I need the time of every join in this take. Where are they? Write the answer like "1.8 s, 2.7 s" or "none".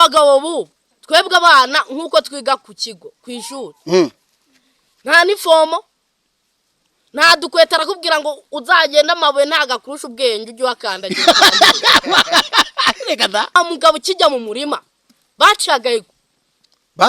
13.6 s